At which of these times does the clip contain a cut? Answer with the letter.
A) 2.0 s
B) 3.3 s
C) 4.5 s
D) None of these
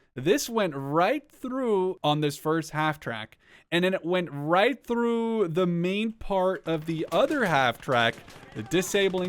A